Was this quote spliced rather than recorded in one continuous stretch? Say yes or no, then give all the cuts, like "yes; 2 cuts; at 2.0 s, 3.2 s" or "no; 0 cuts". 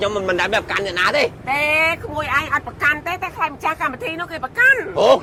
no; 0 cuts